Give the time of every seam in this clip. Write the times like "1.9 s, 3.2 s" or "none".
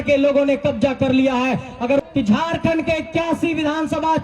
2.0 s